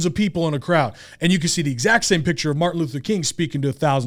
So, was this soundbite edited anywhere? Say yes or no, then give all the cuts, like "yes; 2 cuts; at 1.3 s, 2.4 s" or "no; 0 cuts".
no; 0 cuts